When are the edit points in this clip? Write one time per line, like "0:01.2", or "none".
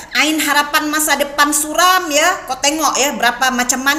none